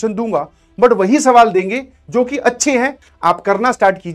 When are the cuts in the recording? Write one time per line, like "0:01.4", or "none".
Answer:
0:03.0